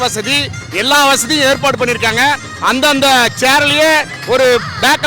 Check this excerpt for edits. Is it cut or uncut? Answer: uncut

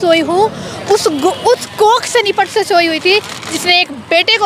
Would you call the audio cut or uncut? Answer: uncut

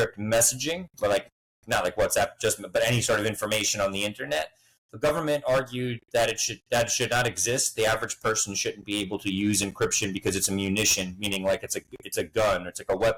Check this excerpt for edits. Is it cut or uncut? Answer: uncut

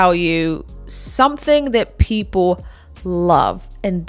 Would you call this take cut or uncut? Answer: uncut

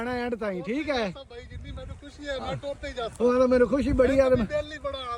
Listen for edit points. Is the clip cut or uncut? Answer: uncut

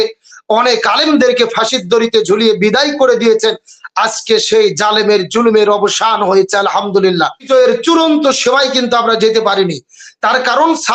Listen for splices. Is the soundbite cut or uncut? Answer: cut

